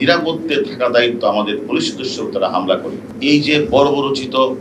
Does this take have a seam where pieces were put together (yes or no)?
yes